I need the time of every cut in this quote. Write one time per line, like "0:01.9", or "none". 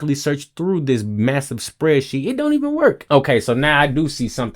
0:03.0